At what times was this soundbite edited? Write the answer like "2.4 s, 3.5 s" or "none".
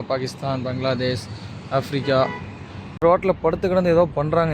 3.0 s